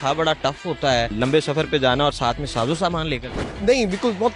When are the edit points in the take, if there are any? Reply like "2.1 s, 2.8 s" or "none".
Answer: 1.1 s, 3.4 s